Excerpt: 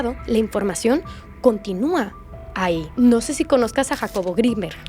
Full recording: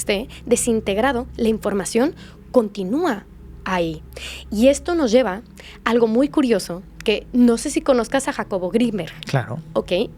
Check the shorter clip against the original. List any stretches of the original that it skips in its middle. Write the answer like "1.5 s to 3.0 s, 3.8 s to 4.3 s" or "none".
4.0 s to 7.2 s